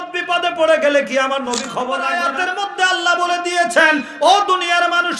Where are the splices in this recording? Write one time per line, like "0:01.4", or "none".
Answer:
0:02.1